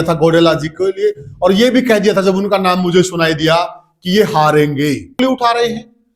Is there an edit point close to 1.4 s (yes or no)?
no